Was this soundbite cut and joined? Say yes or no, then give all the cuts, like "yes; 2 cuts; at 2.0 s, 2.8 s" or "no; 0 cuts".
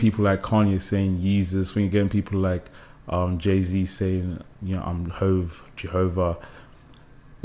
no; 0 cuts